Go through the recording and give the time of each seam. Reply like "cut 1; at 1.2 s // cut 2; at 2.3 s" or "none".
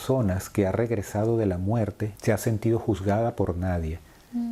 cut 1; at 2.1 s